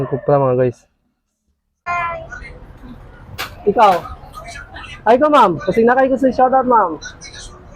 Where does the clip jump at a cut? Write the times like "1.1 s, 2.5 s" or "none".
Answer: 1.9 s